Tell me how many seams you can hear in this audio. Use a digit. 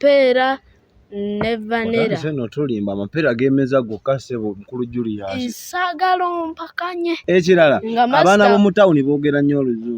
1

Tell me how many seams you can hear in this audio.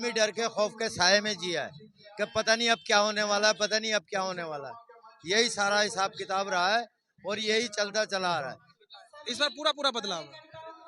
1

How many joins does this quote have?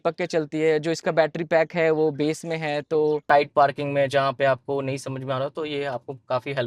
1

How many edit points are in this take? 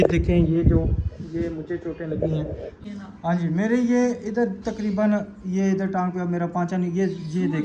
1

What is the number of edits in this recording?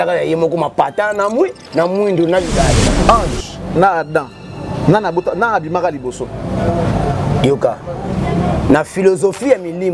1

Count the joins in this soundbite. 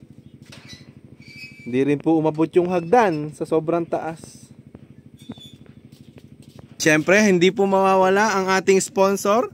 1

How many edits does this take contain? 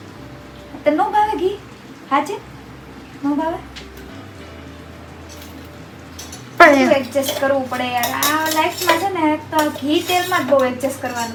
0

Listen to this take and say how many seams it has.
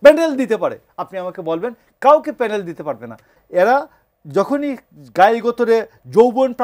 1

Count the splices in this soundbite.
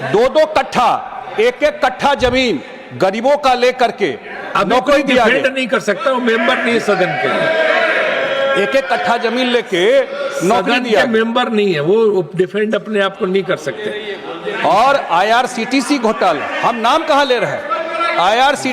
0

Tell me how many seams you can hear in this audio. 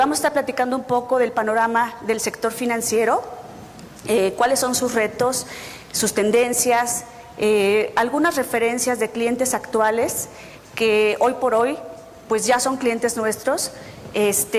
1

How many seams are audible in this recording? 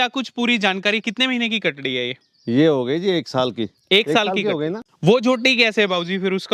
1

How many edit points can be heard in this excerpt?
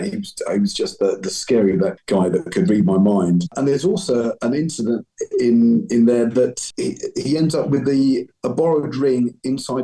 3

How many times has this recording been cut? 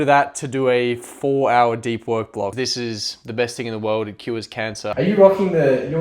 2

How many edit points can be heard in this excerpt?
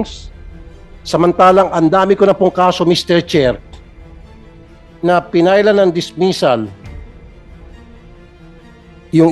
2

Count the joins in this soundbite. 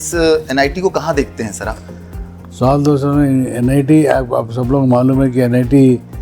0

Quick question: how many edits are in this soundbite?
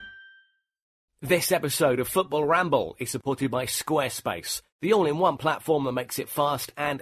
1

